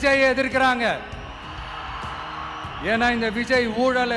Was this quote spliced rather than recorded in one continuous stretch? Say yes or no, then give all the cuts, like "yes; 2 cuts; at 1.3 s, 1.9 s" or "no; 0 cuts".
no; 0 cuts